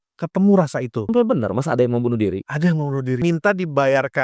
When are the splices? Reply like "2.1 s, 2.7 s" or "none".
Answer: 1.1 s, 3.2 s